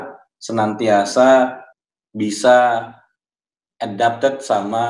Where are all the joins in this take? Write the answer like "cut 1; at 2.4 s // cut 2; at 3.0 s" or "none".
cut 1; at 1.6 s